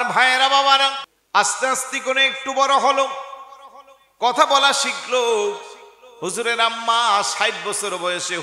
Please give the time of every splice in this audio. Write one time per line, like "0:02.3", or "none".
0:01.1